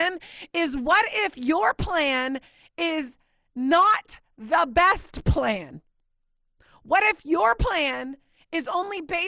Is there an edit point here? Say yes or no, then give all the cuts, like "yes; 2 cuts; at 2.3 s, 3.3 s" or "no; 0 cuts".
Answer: no; 0 cuts